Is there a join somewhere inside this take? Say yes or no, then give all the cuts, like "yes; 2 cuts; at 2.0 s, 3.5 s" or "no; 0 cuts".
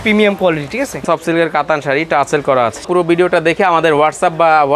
yes; 2 cuts; at 1.0 s, 2.9 s